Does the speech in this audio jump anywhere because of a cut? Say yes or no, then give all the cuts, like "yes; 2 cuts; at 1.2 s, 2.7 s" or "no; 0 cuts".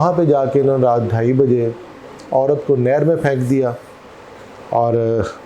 no; 0 cuts